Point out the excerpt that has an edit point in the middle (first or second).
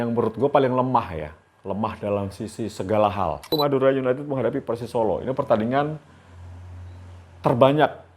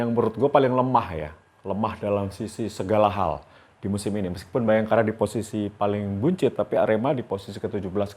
first